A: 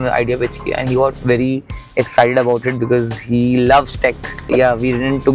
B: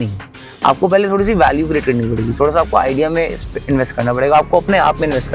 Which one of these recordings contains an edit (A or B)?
A